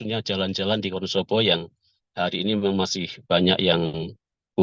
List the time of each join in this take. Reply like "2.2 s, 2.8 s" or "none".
none